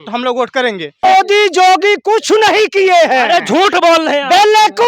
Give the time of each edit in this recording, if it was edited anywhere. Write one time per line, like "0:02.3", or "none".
0:01.0